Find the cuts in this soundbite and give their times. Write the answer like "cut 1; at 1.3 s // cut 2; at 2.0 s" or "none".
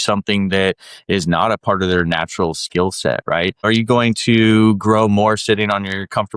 cut 1; at 3.7 s